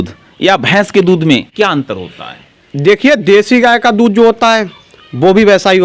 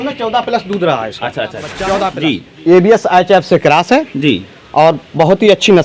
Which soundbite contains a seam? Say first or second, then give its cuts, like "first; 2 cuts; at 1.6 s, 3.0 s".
second; 1 cut; at 2.2 s